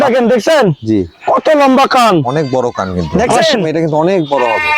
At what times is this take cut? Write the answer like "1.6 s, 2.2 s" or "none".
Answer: 3.0 s